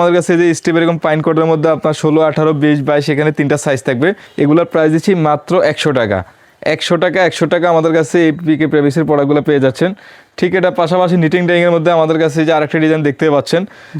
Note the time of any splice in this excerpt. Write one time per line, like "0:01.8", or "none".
none